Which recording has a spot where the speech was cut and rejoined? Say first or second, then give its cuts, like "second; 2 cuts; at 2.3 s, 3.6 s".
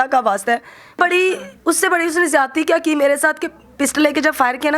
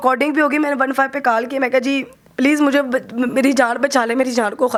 first; 1 cut; at 0.9 s